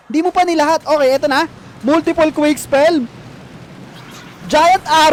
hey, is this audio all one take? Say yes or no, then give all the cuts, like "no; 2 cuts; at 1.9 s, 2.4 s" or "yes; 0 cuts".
yes; 0 cuts